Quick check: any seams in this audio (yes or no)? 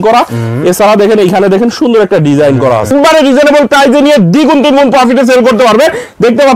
yes